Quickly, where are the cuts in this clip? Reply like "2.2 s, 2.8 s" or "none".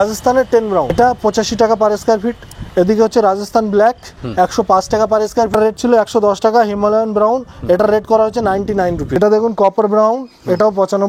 0.9 s, 5.5 s, 9.2 s